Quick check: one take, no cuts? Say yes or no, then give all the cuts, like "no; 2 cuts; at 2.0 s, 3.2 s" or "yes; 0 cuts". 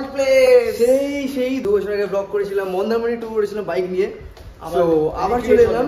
yes; 0 cuts